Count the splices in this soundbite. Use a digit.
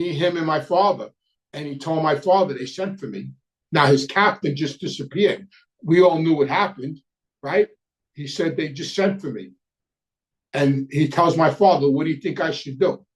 0